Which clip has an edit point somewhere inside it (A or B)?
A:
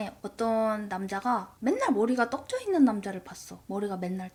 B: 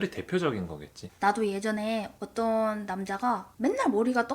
B